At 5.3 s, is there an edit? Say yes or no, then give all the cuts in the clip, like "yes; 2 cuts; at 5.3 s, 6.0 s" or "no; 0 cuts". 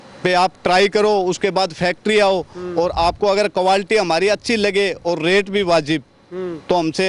no; 0 cuts